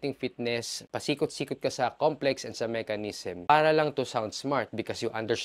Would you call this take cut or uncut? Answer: uncut